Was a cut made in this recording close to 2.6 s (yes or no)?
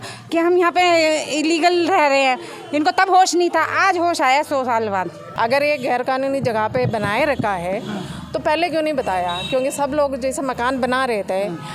no